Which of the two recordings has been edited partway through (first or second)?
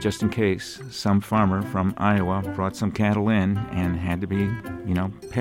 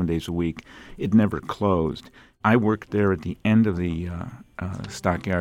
second